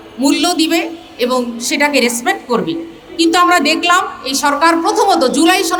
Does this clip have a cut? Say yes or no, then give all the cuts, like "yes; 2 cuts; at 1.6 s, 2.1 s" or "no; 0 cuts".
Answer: no; 0 cuts